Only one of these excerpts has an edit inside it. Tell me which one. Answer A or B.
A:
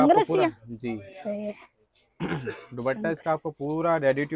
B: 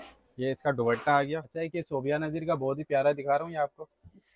B